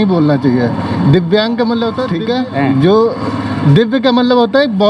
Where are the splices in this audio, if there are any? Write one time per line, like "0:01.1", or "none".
0:02.1